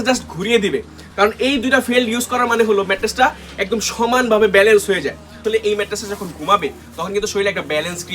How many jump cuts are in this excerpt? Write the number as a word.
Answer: one